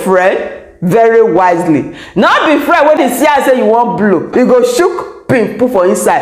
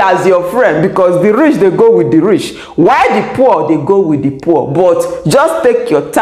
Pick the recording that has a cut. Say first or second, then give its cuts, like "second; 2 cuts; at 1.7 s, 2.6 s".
first; 2 cuts; at 3.0 s, 4.3 s